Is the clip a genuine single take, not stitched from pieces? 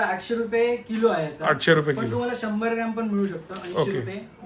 yes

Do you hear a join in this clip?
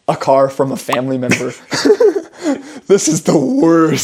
no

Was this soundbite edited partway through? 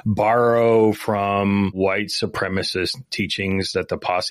yes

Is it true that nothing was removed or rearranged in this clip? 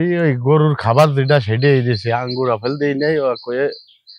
yes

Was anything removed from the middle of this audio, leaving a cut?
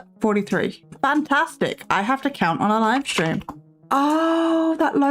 no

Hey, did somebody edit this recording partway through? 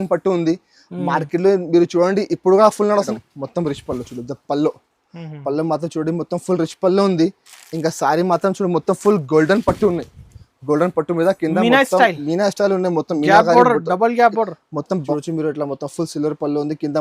yes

